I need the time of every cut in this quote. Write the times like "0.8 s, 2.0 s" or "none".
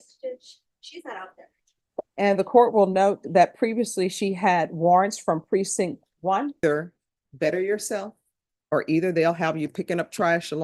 2.1 s, 6.6 s